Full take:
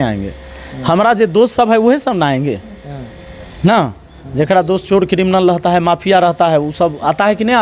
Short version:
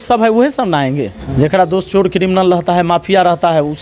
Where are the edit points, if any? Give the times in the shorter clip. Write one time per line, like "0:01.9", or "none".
0:01.2

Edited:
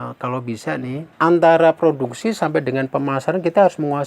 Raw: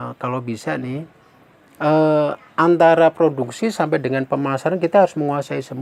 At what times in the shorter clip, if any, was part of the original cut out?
0:01.1

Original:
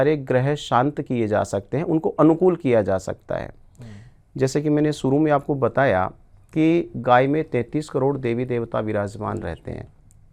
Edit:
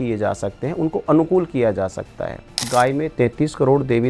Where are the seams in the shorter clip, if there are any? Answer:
0:02.6

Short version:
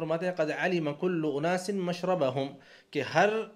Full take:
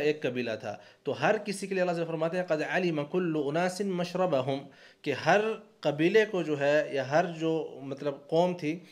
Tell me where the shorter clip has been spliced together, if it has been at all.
none

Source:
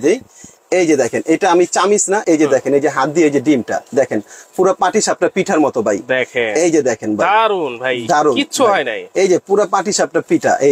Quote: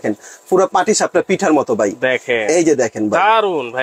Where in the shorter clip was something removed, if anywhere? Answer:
none

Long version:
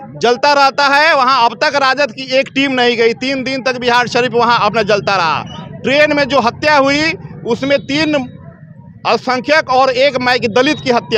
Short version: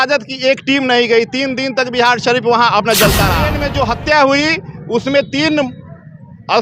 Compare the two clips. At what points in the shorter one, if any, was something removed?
0:03.6

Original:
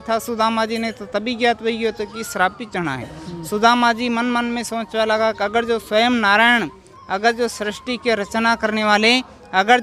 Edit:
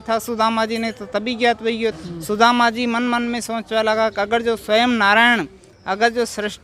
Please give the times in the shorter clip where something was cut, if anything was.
0:02.0

